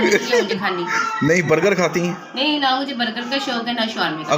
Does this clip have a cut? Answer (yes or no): no